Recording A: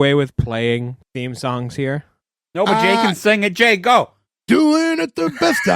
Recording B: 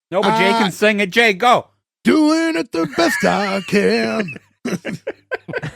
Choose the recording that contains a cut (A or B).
A